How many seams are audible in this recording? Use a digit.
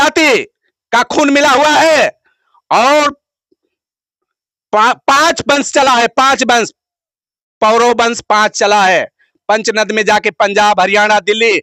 0